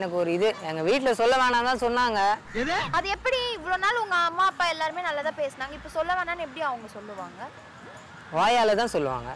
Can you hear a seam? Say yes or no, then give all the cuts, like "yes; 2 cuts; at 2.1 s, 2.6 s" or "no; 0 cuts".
no; 0 cuts